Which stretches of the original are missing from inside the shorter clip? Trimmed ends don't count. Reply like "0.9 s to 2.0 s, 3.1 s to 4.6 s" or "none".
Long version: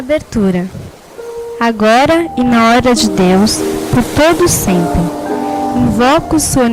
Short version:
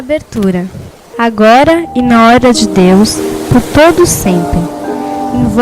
1.0 s to 1.4 s